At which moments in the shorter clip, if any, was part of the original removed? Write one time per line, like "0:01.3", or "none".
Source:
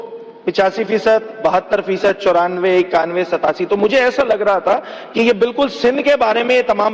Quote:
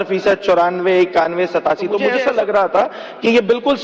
0:02.1